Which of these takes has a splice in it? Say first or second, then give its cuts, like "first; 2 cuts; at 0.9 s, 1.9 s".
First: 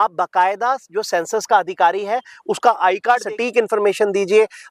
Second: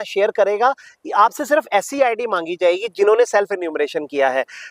first; 1 cut; at 3.3 s